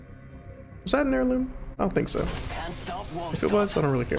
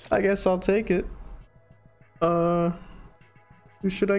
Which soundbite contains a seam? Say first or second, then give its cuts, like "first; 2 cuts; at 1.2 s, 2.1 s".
first; 1 cut; at 1.6 s